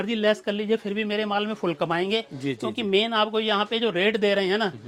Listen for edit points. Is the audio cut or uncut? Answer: uncut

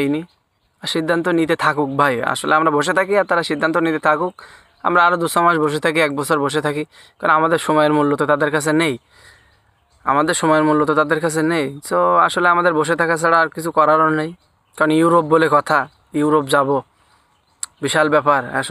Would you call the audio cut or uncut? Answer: uncut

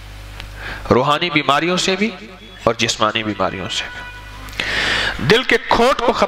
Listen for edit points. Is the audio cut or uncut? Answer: uncut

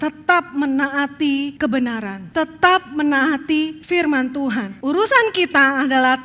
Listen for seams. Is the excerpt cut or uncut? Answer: cut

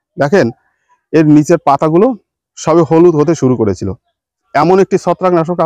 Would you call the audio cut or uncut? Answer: cut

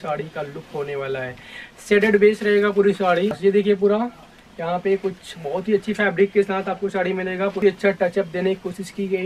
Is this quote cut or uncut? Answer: cut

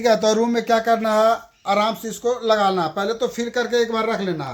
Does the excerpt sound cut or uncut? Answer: uncut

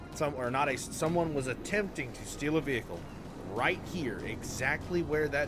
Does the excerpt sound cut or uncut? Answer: uncut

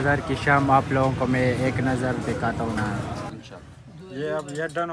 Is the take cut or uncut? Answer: cut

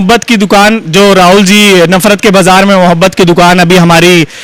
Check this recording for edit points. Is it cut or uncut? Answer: uncut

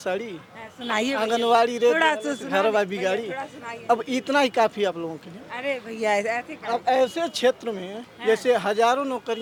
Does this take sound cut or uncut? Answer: uncut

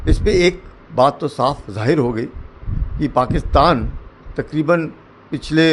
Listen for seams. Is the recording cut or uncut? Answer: uncut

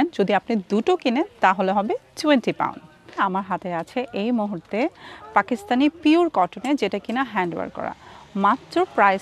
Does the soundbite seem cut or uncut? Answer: uncut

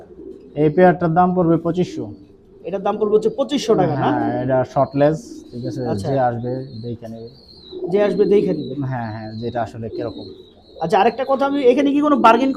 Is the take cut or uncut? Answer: uncut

